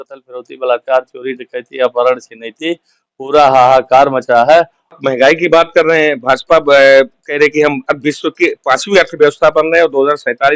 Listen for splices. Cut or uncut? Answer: cut